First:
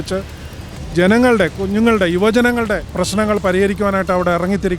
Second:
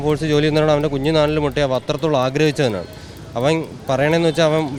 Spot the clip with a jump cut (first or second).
first